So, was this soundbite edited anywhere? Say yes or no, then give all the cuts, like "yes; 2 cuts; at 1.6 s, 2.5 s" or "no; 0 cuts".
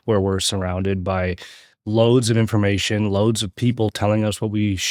no; 0 cuts